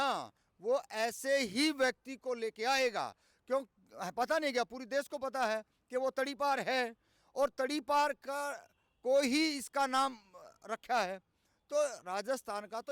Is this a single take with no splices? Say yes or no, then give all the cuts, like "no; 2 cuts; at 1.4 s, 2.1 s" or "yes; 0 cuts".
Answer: yes; 0 cuts